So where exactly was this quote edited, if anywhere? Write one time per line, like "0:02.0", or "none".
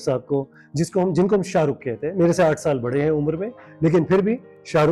none